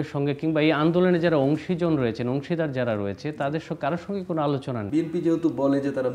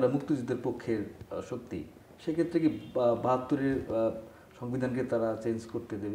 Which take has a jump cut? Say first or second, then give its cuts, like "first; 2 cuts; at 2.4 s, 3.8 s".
first; 1 cut; at 4.9 s